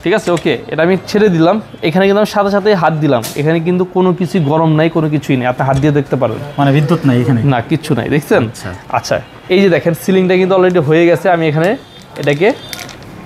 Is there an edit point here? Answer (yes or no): no